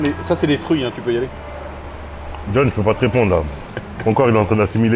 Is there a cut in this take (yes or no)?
no